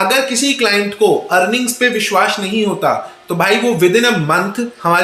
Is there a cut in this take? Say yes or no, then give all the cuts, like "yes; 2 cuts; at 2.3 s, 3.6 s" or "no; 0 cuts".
no; 0 cuts